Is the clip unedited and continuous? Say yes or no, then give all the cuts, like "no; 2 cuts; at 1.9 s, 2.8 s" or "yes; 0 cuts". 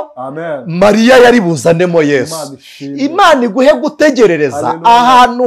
yes; 0 cuts